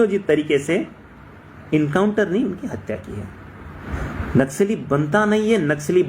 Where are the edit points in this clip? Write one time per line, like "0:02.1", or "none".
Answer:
0:03.8

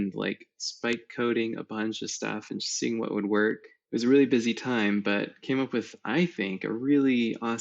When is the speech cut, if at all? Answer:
0:03.7

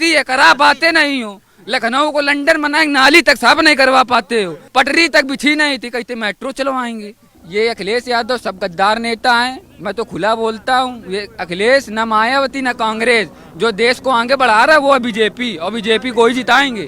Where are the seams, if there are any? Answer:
0:04.6
0:07.3

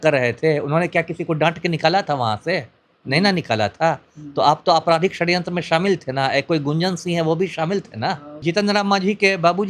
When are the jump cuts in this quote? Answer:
0:08.4

